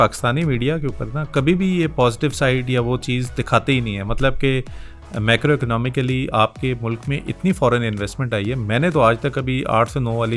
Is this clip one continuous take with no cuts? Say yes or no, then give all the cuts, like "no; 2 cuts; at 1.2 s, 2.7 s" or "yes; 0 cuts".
yes; 0 cuts